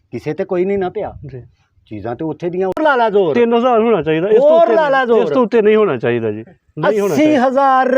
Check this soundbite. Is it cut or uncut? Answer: cut